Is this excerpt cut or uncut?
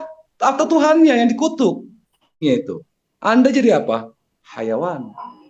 cut